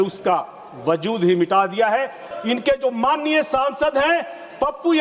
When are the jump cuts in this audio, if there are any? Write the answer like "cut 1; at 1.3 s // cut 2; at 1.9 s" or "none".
cut 1; at 2.2 s